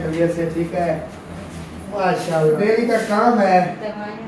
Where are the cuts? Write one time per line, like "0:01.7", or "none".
0:02.6